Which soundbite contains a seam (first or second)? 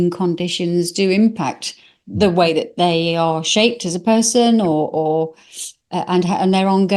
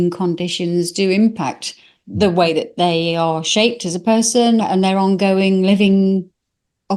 second